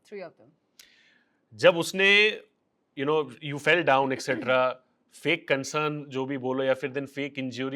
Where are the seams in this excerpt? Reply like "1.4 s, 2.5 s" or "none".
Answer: none